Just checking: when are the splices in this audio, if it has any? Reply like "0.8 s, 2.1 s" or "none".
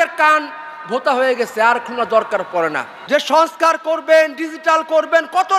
2.9 s